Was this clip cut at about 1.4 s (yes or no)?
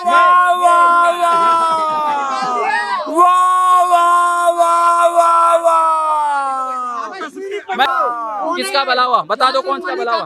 no